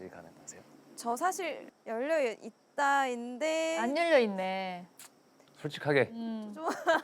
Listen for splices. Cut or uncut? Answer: cut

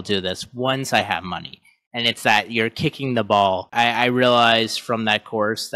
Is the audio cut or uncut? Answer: cut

